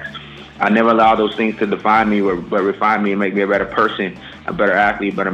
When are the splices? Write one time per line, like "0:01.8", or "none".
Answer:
none